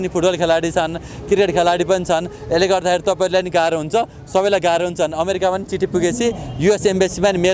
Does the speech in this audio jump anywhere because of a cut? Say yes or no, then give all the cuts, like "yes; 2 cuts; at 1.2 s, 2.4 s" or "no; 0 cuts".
no; 0 cuts